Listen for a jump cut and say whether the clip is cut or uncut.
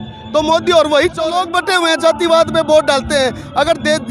cut